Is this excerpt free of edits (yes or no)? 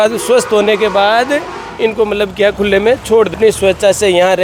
yes